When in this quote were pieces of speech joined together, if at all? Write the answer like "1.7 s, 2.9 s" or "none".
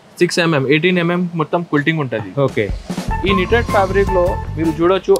none

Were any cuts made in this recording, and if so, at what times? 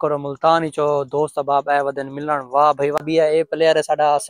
3.0 s

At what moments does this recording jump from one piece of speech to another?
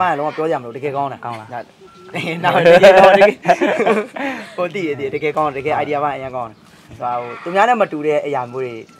none

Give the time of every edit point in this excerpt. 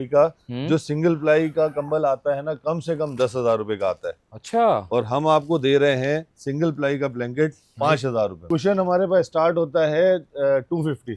8.4 s

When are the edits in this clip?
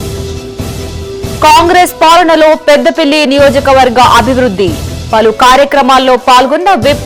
1.1 s

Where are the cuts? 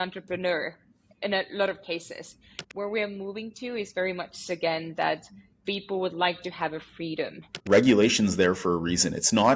2.6 s, 7.5 s

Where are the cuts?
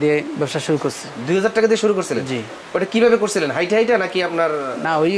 none

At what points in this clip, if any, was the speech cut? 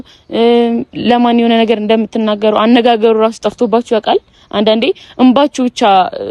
none

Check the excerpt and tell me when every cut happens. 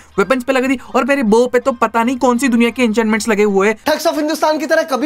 none

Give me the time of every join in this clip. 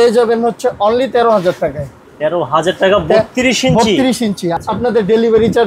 4.5 s

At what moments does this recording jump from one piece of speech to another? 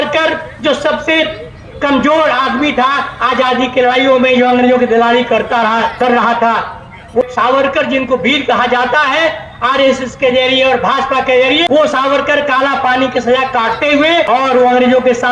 7.2 s, 11.6 s, 14.3 s

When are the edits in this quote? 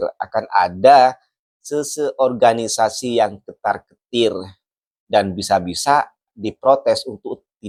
none

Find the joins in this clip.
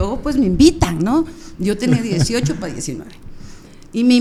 none

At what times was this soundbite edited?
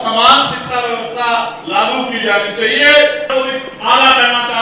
3.3 s

